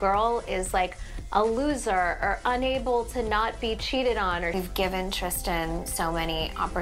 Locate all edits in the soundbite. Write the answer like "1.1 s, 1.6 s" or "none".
none